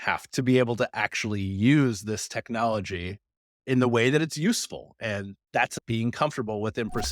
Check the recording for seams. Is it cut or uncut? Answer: cut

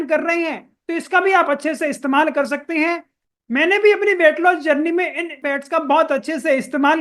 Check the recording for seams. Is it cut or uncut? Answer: cut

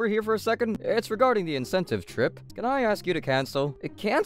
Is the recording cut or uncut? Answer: cut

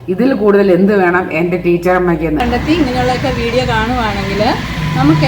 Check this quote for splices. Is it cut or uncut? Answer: cut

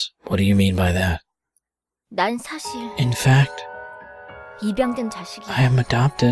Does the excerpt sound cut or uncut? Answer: cut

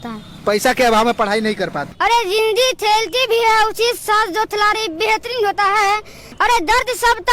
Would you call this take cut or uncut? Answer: cut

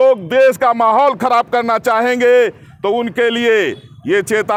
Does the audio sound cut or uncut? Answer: uncut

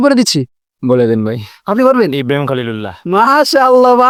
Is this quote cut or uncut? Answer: uncut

